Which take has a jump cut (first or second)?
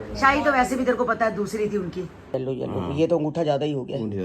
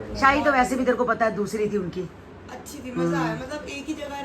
first